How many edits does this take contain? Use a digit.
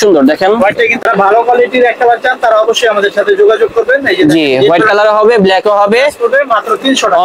1